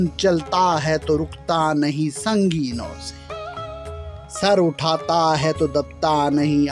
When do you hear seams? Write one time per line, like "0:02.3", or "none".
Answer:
0:02.9
0:04.4